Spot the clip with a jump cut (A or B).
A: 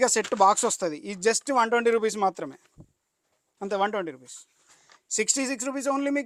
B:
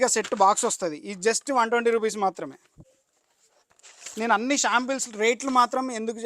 B